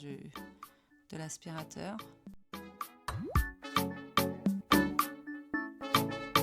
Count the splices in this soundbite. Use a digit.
0